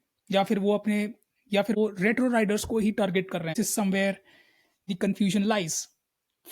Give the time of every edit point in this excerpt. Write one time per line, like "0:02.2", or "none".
0:01.8
0:03.5